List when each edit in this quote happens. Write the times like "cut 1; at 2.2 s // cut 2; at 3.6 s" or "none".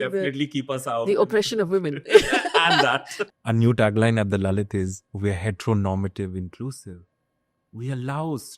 cut 1; at 3.1 s